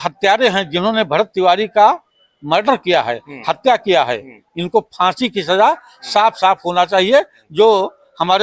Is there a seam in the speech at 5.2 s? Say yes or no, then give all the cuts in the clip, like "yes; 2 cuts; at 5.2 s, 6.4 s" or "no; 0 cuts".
no; 0 cuts